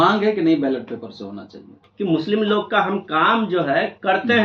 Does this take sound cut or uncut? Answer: cut